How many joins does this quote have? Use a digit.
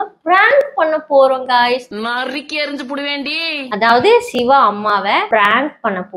1